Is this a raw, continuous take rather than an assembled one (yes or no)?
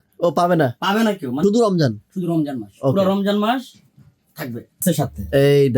no